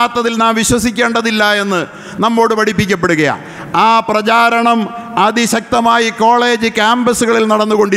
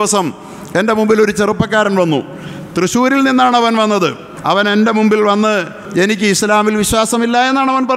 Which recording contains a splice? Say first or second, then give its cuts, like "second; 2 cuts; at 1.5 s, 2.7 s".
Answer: second; 2 cuts; at 4.3 s, 5.8 s